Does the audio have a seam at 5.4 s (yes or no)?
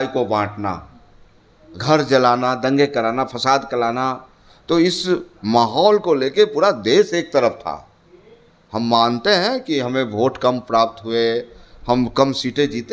no